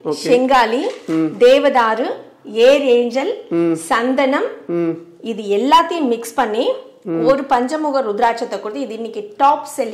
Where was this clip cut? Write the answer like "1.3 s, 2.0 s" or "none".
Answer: none